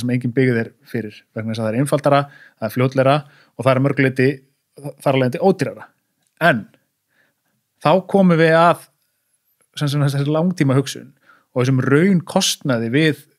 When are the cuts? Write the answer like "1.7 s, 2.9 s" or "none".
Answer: none

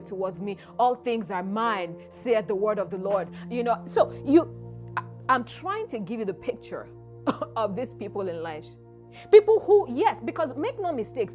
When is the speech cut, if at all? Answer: none

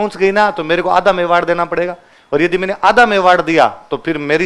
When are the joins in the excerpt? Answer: none

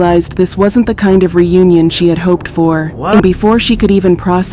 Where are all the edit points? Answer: 3.2 s

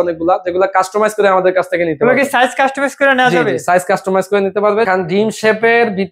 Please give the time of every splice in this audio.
4.9 s

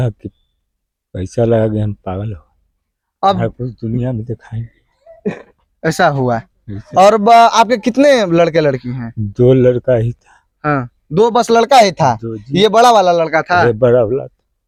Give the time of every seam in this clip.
none

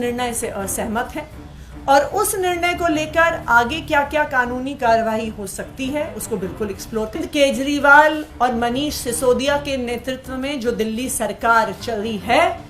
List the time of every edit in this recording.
7.2 s

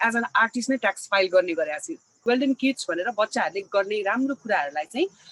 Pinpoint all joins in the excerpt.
2.2 s

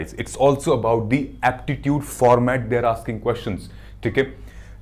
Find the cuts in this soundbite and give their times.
none

